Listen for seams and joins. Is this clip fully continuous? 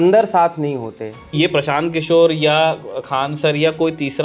no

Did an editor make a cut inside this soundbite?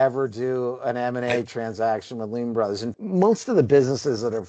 yes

